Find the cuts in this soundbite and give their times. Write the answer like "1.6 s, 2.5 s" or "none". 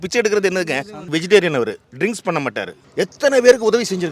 1.0 s, 1.9 s, 2.8 s